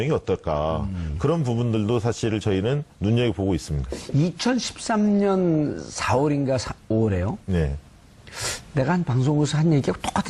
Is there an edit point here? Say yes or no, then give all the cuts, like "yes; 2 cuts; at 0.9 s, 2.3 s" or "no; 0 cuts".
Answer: no; 0 cuts